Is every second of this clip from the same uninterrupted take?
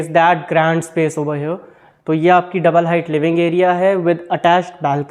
yes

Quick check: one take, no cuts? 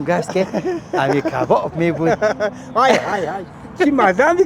yes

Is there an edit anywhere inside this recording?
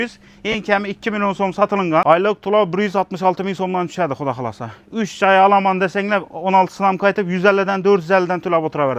yes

